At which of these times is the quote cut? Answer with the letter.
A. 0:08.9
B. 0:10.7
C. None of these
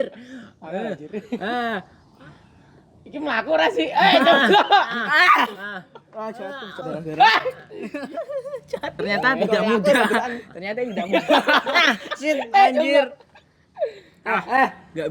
A